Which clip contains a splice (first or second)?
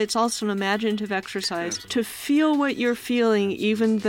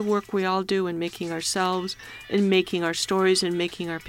first